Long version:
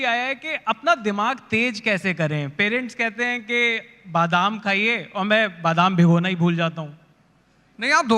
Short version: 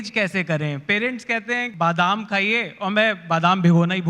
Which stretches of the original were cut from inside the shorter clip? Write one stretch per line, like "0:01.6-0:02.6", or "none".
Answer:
0:03.4-0:04.0